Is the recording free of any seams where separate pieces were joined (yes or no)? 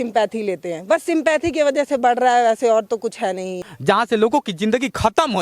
no